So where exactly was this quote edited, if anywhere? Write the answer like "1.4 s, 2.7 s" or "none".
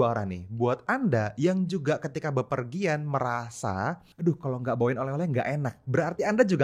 4.1 s